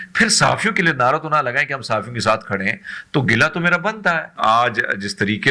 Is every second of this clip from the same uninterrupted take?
no; 1 cut; at 4.3 s

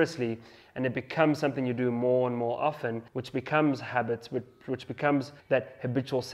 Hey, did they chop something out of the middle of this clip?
yes; 2 cuts; at 3.1 s, 5.4 s

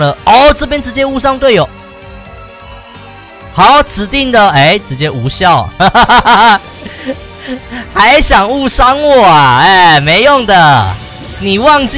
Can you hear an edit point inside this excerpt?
no; 0 cuts

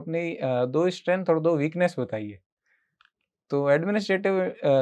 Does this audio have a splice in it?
no; 0 cuts

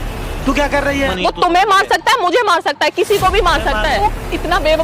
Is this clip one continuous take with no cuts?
no; 2 cuts; at 1.1 s, 3.9 s

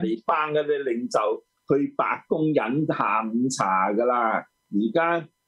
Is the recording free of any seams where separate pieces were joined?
no; 1 cut; at 4.5 s

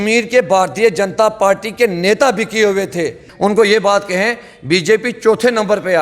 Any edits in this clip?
yes; 1 cut; at 3.3 s

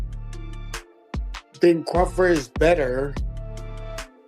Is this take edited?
yes; 1 cut; at 1.6 s

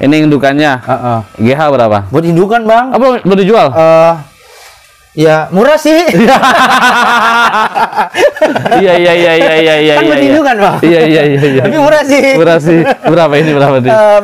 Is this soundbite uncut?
yes; 0 cuts

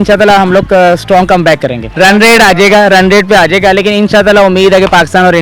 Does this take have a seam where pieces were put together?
yes; 1 cut; at 1.9 s

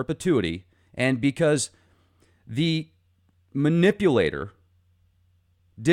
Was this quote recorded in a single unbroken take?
yes; 0 cuts

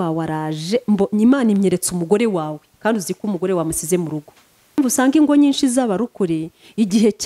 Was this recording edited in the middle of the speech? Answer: yes; 1 cut; at 4.8 s

